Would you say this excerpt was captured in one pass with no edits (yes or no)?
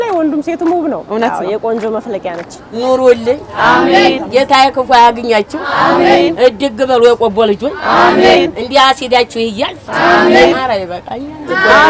no